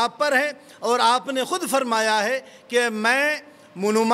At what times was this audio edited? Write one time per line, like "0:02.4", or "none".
none